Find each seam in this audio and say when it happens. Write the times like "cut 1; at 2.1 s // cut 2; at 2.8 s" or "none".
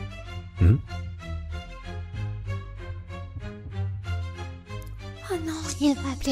cut 1; at 1.2 s // cut 2; at 5.3 s